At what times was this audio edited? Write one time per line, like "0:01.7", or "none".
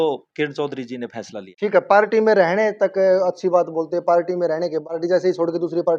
none